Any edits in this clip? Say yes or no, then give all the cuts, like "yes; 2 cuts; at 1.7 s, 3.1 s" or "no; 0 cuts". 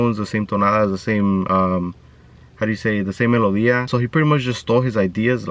yes; 1 cut; at 3.9 s